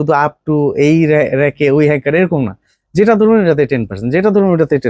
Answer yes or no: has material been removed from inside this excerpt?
no